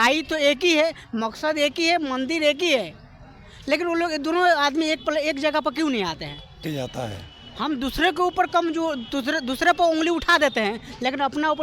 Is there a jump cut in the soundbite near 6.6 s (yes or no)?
yes